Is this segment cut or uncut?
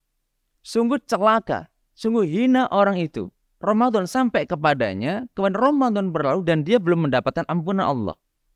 uncut